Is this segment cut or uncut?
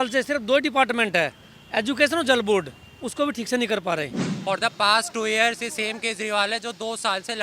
cut